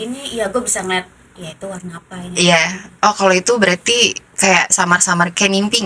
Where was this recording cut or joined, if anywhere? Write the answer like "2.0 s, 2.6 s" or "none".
none